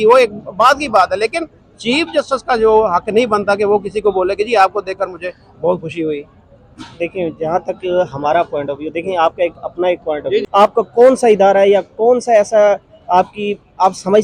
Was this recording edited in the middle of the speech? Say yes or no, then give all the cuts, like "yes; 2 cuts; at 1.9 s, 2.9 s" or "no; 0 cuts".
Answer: yes; 1 cut; at 10.4 s